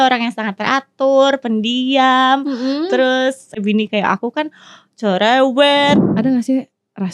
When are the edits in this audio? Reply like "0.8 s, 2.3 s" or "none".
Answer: 3.6 s, 6.0 s